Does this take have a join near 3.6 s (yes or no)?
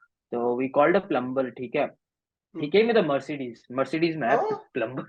no